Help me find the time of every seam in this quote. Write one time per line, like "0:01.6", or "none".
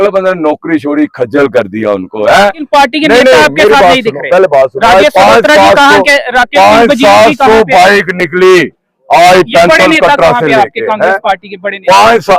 0:02.6